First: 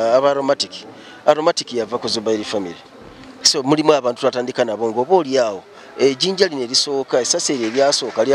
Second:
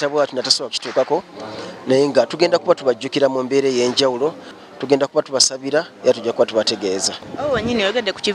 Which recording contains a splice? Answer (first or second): second